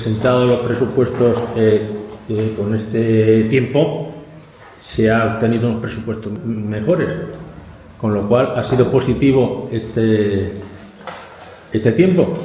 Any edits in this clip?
yes; 1 cut; at 6.3 s

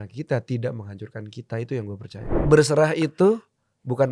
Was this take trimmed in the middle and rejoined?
yes; 1 cut; at 2.4 s

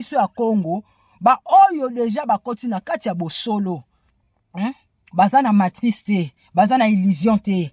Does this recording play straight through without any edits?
yes; 0 cuts

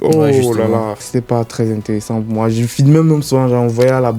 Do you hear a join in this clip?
yes; 1 cut; at 1.0 s

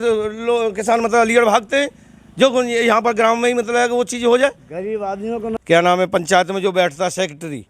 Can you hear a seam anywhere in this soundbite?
yes; 1 cut; at 5.5 s

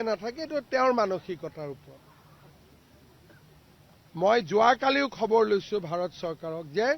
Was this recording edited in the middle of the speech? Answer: yes; 1 cut; at 2.5 s

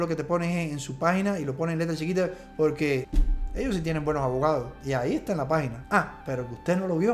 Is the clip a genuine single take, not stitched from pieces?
yes; 0 cuts

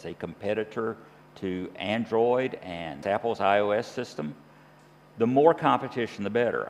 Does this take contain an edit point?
no; 0 cuts

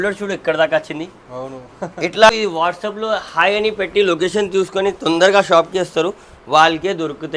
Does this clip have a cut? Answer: yes; 1 cut; at 2.3 s

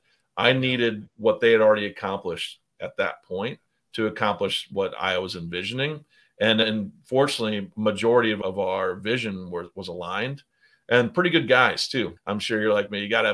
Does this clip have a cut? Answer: yes; 4 cuts; at 4.7 s, 6.6 s, 8.4 s, 12.2 s

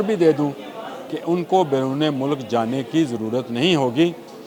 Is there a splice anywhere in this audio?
no; 0 cuts

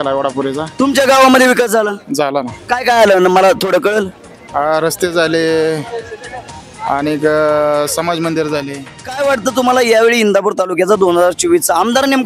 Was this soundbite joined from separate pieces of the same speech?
yes; 1 cut; at 9.1 s

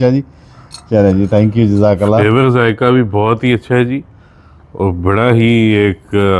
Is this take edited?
no; 0 cuts

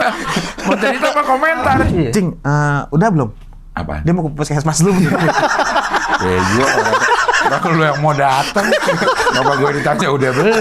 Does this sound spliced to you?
yes; 1 cut; at 1.8 s

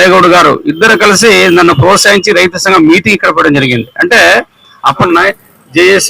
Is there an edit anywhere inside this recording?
yes; 1 cut; at 5.1 s

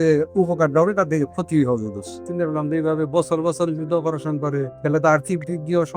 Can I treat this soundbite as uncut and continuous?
no; 2 cuts; at 2.2 s, 4.7 s

